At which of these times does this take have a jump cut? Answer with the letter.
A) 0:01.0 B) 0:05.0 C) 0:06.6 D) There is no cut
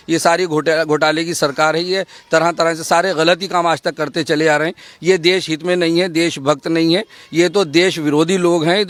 D